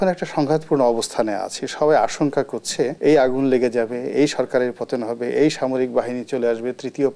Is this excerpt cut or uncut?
cut